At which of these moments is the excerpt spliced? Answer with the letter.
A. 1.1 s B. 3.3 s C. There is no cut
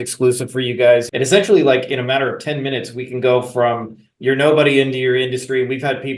A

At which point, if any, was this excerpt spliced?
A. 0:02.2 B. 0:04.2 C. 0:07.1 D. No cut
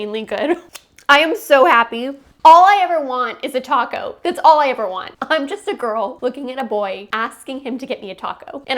A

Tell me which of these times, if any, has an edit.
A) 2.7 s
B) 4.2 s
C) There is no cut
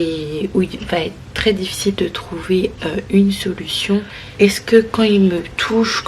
B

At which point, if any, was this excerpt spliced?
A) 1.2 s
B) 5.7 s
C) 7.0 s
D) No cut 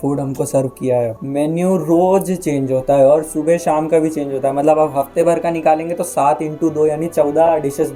A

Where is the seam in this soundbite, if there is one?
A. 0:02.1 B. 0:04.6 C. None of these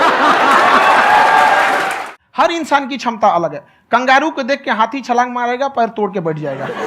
A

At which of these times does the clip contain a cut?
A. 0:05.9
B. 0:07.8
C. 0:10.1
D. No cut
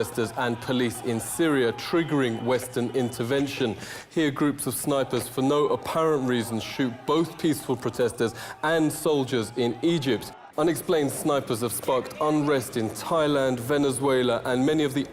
B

